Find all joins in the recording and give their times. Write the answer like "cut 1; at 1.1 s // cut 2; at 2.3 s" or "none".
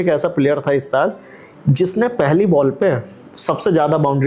none